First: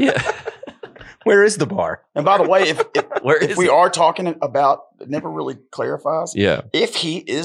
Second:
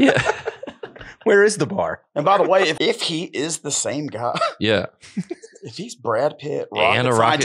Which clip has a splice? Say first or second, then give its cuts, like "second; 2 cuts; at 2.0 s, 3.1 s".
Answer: second; 1 cut; at 2.7 s